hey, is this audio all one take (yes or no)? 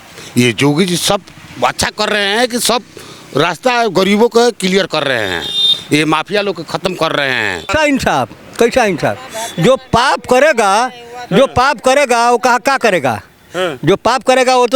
no